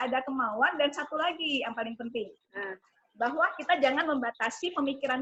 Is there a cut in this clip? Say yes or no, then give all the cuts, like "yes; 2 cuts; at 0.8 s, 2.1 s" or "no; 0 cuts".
no; 0 cuts